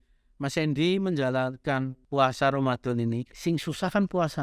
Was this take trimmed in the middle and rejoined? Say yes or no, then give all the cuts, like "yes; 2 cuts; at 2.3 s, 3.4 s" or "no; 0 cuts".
yes; 2 cuts; at 2.0 s, 3.3 s